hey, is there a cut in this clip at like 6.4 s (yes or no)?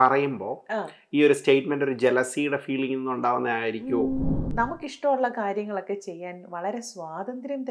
no